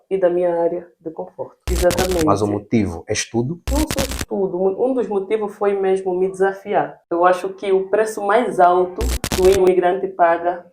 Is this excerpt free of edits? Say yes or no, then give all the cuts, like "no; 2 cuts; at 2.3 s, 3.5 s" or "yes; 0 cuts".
no; 2 cuts; at 1.5 s, 7.0 s